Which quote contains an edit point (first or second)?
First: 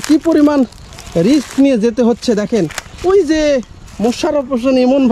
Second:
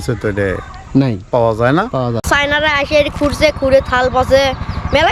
second